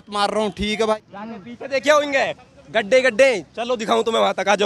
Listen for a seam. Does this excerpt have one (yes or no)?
yes